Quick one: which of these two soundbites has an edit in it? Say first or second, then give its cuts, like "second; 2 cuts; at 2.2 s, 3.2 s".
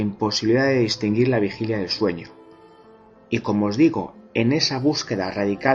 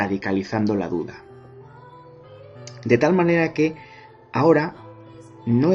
second; 1 cut; at 1.2 s